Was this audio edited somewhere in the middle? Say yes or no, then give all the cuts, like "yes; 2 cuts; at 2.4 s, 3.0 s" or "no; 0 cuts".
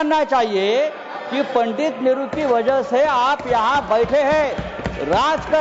no; 0 cuts